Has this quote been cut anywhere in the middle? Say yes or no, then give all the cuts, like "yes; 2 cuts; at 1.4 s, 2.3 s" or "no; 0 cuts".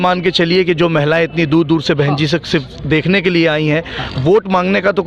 no; 0 cuts